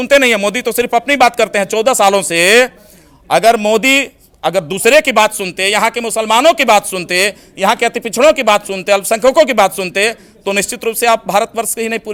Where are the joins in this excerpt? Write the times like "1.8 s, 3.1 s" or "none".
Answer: none

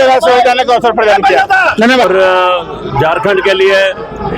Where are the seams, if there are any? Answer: 2.0 s

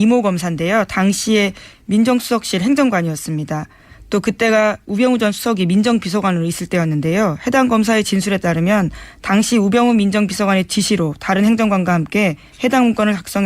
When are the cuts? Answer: 10.2 s

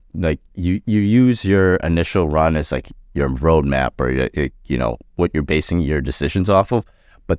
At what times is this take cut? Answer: none

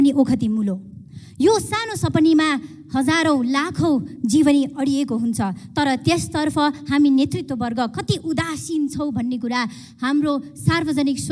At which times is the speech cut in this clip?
none

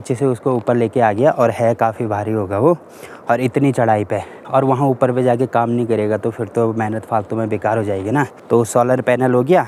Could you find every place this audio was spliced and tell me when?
none

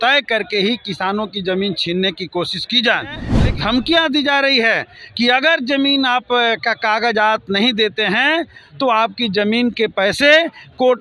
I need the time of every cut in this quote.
3.3 s

